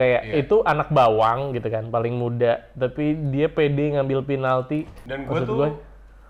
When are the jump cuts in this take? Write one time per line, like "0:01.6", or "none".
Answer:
0:05.0